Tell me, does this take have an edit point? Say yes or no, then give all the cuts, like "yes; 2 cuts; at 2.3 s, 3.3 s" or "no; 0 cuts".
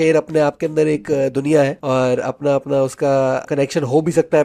yes; 2 cuts; at 1.8 s, 3.5 s